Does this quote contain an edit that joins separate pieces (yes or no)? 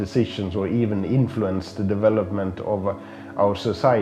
no